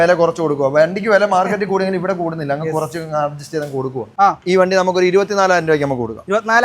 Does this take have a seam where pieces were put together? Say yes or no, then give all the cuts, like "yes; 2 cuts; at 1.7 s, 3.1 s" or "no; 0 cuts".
yes; 1 cut; at 4.1 s